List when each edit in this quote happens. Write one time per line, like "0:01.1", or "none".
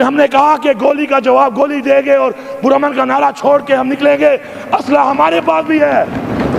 none